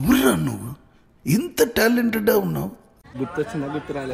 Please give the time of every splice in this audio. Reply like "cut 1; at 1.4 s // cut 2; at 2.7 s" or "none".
cut 1; at 3.1 s

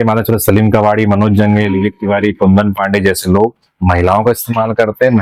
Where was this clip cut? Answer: none

